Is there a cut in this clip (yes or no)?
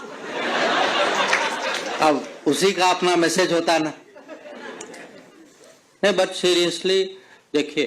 no